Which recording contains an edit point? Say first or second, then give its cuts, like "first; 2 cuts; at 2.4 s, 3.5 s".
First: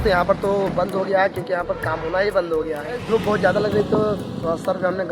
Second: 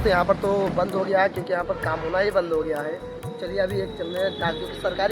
first; 1 cut; at 2.9 s